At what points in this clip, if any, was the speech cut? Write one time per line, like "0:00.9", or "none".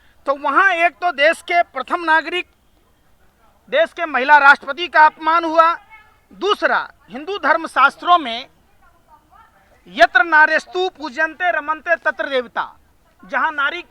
none